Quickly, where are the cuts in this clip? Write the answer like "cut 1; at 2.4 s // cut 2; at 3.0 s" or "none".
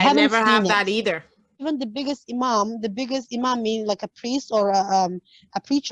cut 1; at 1.6 s